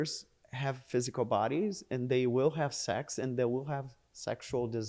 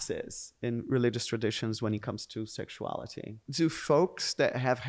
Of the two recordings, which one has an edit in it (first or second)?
second